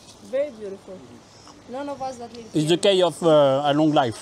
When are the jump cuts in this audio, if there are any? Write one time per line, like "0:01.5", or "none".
none